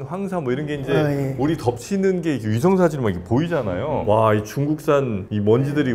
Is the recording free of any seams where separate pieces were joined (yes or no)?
no